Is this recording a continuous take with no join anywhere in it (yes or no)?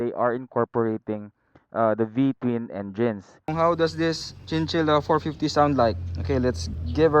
no